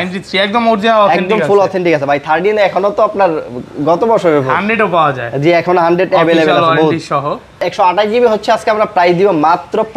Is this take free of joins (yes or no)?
no